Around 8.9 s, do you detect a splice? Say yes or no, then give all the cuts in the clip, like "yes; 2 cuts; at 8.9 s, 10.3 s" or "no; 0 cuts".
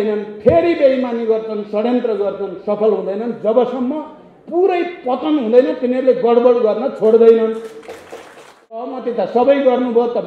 yes; 1 cut; at 8.9 s